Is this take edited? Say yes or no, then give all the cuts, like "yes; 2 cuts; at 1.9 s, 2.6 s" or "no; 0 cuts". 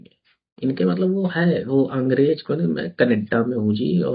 no; 0 cuts